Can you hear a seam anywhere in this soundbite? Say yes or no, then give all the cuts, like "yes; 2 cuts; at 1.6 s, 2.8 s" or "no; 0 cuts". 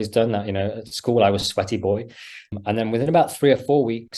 yes; 1 cut; at 2.5 s